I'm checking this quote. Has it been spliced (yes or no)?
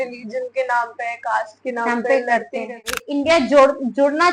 yes